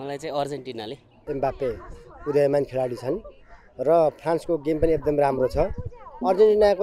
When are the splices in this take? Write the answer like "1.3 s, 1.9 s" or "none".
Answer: 1.2 s